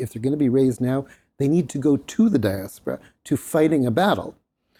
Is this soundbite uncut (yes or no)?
yes